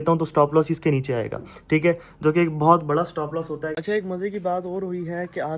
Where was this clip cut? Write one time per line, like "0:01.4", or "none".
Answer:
0:03.8